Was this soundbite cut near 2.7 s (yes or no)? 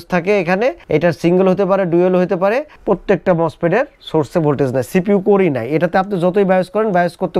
yes